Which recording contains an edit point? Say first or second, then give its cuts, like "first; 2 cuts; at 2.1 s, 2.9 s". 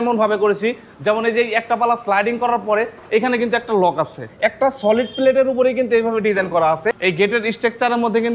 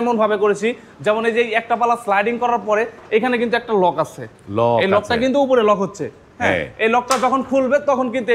first; 2 cuts; at 4.2 s, 6.9 s